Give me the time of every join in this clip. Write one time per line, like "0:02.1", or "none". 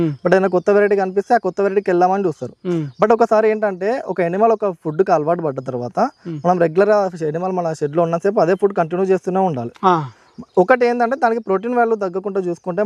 none

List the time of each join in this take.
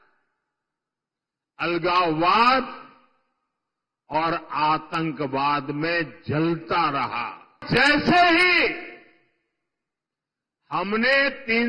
0:07.6

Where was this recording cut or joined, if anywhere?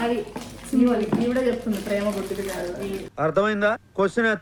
none

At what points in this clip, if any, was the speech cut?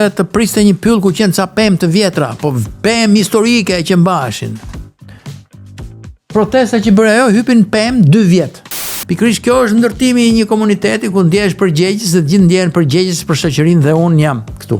0:08.9

